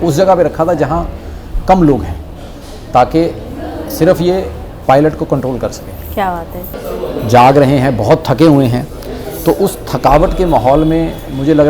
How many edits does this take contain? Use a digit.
1